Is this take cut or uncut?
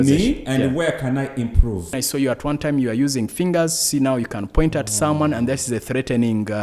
cut